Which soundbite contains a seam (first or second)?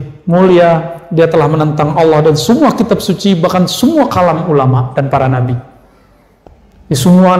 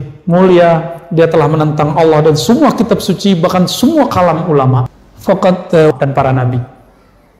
second